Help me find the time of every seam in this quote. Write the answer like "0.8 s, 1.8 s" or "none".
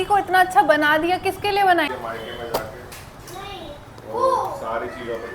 1.9 s